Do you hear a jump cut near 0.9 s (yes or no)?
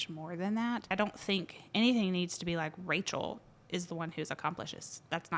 yes